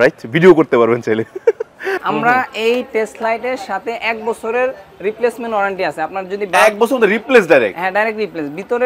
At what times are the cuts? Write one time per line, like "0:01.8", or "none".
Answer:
0:01.9